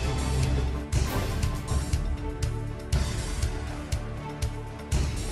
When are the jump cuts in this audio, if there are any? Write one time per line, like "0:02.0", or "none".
none